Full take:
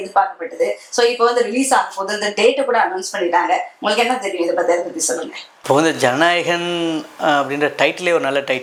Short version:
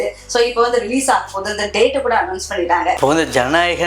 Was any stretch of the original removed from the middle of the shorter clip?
yes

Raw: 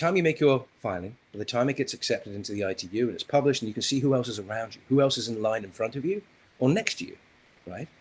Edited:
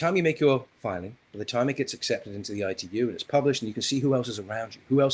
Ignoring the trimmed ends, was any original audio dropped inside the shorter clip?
no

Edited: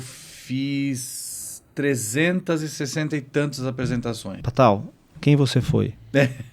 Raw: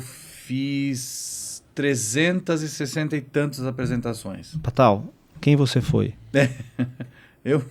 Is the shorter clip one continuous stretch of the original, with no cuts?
no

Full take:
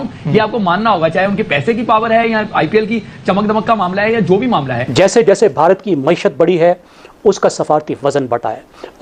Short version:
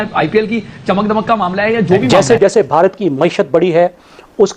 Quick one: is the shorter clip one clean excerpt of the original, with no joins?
no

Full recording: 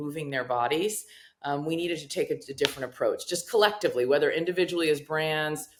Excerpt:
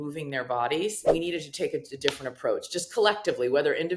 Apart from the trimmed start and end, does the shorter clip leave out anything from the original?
yes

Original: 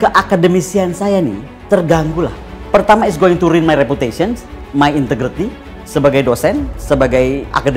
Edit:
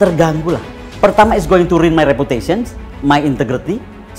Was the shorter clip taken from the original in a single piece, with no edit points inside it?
yes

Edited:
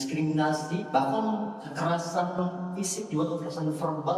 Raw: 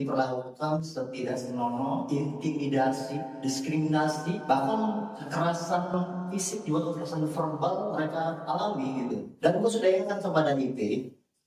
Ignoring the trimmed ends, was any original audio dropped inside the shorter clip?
no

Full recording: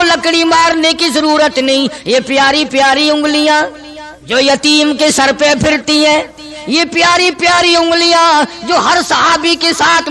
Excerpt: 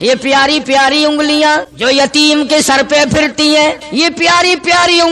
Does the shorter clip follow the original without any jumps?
no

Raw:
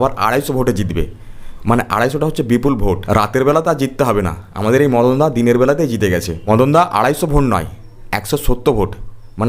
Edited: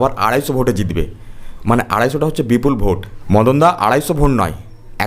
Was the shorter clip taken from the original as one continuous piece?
no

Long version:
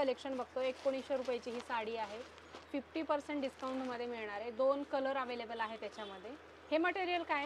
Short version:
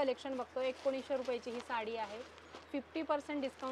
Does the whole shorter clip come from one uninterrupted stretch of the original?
yes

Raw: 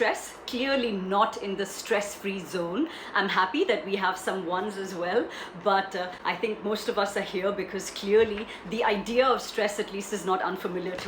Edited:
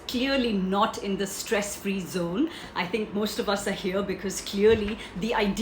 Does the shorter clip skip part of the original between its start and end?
yes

